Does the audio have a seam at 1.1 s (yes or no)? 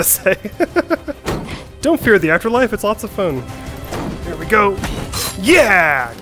yes